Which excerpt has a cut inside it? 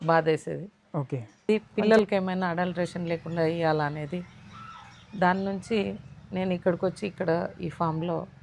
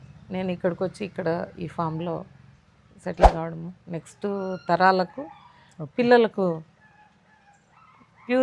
first; 1 cut; at 1.5 s

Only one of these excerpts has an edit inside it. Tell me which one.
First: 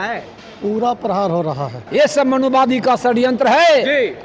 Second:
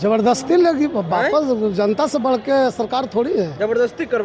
first; 1 cut; at 1.8 s

